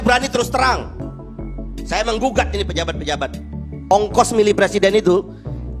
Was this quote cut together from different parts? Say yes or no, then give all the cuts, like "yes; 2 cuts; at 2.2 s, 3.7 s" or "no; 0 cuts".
yes; 1 cut; at 3.9 s